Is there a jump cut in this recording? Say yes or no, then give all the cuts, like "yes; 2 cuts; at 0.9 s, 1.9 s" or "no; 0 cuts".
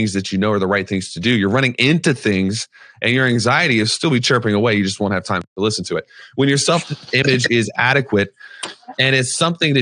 no; 0 cuts